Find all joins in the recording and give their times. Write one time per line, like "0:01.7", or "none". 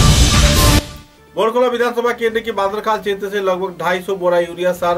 0:01.0